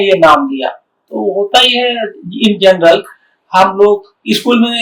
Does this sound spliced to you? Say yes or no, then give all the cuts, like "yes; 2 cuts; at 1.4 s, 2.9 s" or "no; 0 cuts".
no; 0 cuts